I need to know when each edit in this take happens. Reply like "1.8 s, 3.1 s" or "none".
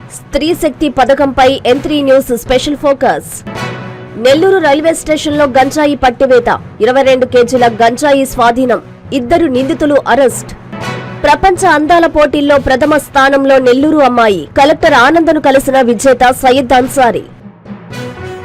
17.4 s